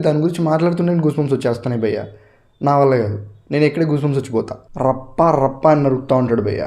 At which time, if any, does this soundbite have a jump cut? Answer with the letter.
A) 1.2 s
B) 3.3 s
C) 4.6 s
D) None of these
C